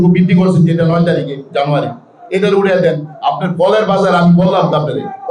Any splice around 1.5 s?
no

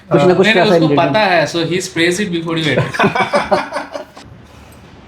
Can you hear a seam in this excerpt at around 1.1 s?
no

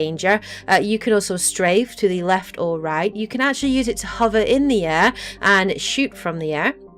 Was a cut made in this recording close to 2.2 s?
no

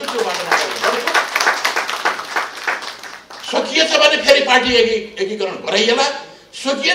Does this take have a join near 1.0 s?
no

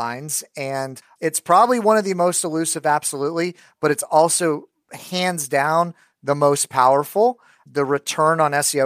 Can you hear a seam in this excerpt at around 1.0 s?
yes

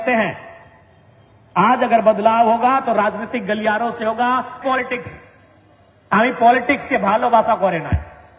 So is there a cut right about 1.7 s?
no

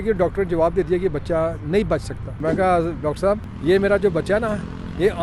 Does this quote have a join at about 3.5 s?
yes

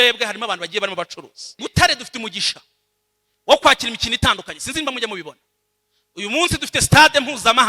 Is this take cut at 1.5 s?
yes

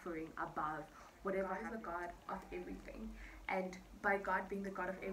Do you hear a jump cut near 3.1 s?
no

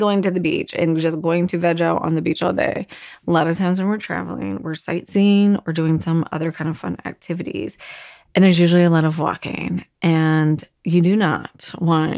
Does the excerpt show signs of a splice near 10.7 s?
no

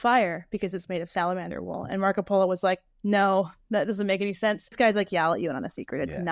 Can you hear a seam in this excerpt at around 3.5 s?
no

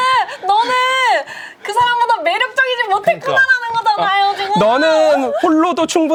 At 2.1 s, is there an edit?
no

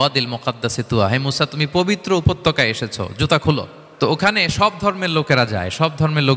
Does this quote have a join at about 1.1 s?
no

